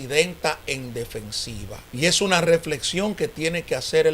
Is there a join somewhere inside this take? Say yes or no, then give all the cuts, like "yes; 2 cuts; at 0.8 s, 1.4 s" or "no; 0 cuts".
yes; 1 cut; at 1.8 s